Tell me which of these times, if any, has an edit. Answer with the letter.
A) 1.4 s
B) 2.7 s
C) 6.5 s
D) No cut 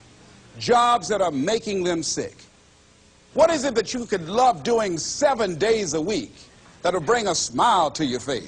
B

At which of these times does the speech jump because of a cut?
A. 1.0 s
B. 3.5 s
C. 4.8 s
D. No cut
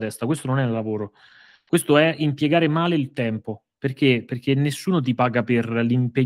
D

